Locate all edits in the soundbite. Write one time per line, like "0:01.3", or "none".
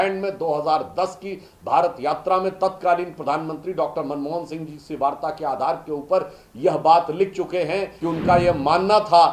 0:07.9